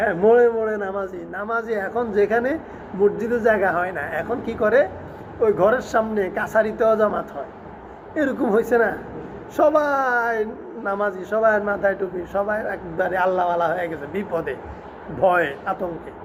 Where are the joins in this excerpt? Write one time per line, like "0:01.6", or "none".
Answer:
none